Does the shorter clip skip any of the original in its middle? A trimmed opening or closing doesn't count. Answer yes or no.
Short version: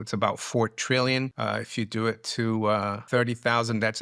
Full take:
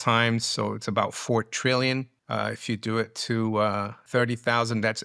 yes